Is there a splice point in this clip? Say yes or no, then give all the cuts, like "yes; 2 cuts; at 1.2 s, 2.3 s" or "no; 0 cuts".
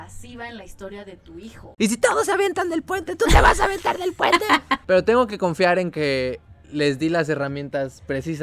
yes; 2 cuts; at 1.7 s, 4.8 s